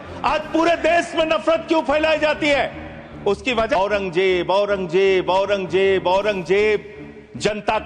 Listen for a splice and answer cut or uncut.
cut